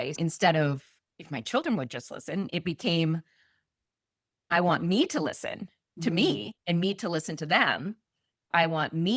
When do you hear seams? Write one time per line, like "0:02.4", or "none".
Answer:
none